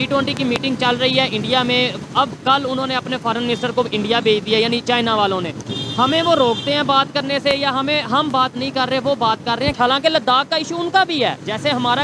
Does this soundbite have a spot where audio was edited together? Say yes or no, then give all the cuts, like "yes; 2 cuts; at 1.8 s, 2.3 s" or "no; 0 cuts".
no; 0 cuts